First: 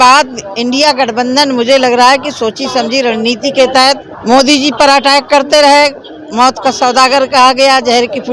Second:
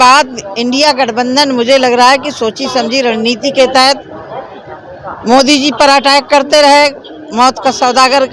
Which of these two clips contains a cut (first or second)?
first